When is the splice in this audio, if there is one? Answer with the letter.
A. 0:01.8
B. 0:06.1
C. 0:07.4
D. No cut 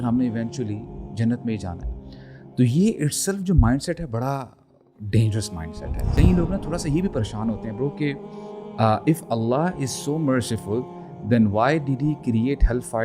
B